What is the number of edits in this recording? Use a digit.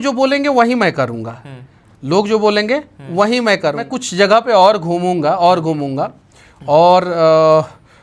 1